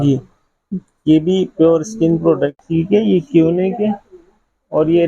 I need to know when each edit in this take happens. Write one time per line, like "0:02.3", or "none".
0:02.6